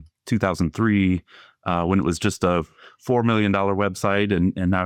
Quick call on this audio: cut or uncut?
uncut